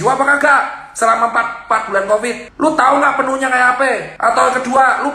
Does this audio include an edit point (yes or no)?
yes